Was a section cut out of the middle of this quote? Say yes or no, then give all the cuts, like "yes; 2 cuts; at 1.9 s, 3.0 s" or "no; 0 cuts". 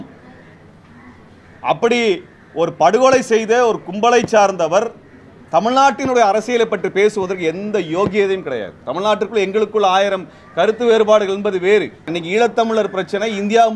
yes; 1 cut; at 12.1 s